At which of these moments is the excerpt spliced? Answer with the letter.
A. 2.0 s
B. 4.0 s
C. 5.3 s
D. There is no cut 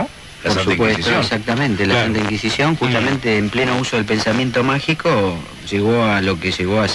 B